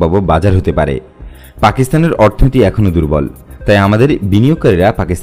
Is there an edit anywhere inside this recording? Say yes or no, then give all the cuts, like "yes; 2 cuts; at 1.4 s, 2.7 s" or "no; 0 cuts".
no; 0 cuts